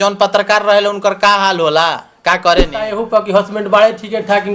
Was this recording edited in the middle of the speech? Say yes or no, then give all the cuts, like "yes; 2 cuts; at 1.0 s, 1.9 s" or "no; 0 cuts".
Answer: yes; 1 cut; at 2.9 s